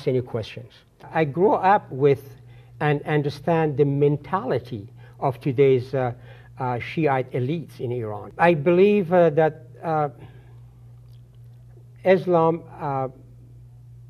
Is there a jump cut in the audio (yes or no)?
yes